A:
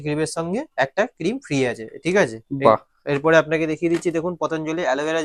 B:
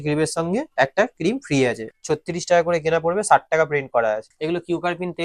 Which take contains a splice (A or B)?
B